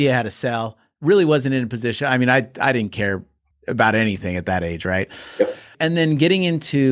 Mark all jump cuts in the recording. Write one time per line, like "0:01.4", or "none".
0:05.7